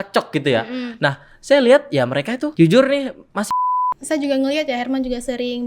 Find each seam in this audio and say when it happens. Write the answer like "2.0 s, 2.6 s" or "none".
2.5 s, 3.5 s